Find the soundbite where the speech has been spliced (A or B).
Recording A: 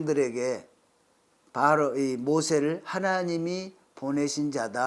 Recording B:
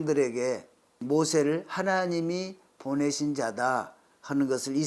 B